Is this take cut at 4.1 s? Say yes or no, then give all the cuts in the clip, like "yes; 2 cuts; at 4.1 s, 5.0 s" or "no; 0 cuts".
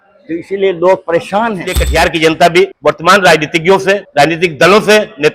yes; 3 cuts; at 1.7 s, 2.8 s, 4.1 s